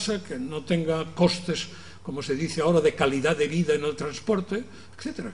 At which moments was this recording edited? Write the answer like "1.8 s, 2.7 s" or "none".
3.3 s